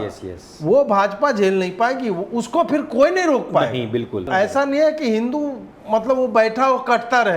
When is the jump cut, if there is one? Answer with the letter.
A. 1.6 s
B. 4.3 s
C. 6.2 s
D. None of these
B